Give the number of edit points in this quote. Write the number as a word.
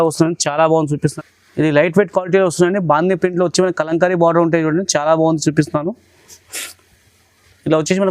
one